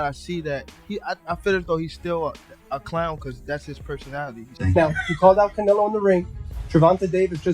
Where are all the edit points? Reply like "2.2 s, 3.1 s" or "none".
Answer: 4.4 s